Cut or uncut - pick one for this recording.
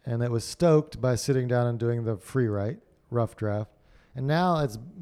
cut